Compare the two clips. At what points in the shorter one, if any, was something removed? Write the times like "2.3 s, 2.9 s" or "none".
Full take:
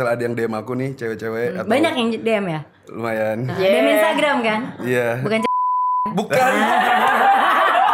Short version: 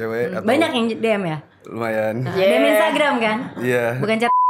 none